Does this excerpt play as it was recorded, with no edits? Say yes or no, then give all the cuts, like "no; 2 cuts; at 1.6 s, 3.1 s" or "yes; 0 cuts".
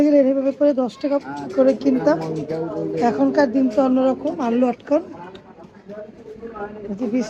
yes; 0 cuts